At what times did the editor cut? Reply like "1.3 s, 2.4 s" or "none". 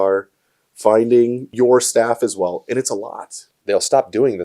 1.5 s, 3.6 s